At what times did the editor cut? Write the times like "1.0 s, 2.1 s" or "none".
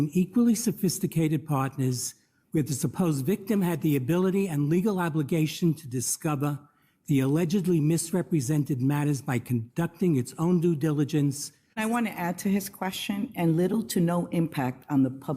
11.8 s